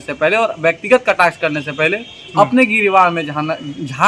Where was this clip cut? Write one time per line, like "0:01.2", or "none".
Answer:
none